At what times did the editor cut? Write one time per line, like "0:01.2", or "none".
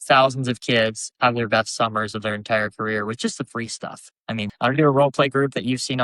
0:04.5